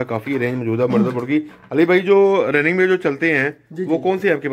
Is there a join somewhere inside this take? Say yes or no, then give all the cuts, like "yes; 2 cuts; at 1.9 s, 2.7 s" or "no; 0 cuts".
no; 0 cuts